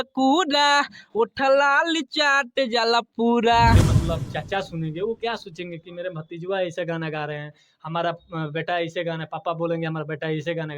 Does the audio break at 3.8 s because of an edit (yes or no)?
yes